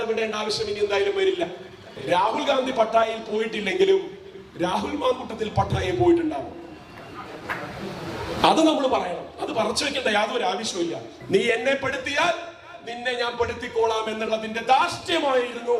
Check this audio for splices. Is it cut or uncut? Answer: cut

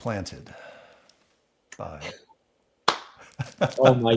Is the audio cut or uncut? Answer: uncut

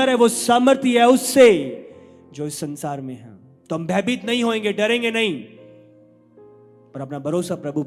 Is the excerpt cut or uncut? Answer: uncut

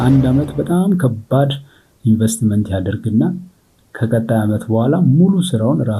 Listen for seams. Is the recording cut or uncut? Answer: uncut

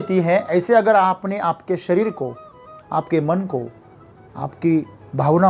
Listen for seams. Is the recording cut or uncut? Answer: uncut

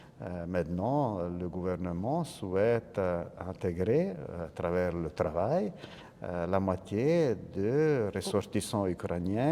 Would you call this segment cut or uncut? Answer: uncut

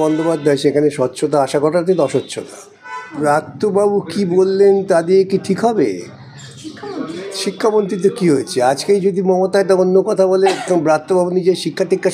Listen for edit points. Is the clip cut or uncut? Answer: uncut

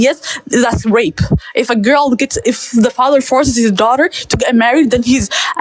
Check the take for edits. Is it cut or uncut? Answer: uncut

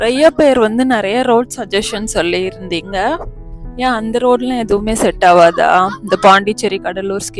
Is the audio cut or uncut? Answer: uncut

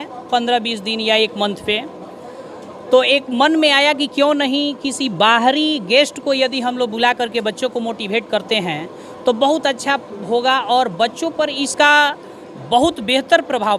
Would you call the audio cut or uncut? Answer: uncut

